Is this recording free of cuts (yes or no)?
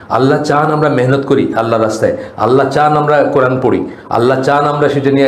yes